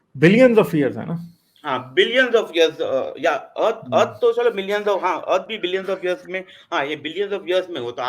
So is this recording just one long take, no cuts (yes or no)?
yes